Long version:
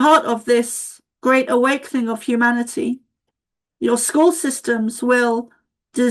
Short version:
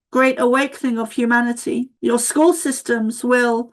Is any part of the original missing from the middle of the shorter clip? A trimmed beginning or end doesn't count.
yes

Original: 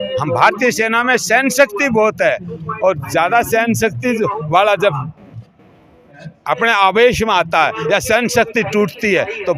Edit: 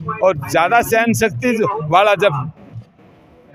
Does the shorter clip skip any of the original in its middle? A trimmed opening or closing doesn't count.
no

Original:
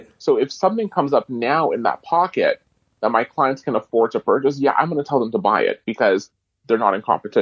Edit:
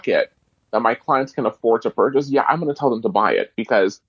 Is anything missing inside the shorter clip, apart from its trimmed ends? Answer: no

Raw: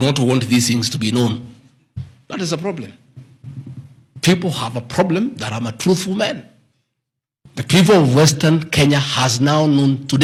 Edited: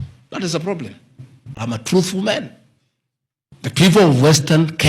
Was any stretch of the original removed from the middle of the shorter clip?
yes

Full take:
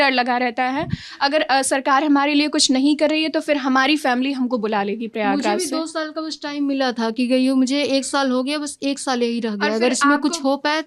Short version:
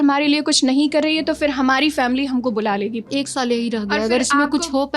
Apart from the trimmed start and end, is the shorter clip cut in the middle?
yes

